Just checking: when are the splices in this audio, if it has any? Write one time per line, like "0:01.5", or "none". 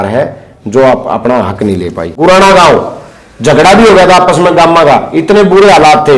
0:02.0